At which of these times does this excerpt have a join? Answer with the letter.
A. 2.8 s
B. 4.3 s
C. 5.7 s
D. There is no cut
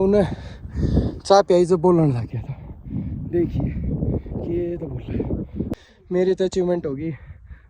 C